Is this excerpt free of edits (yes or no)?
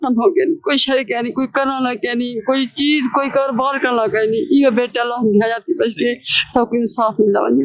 yes